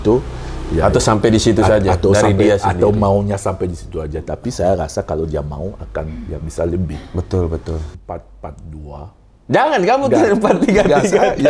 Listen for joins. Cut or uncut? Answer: cut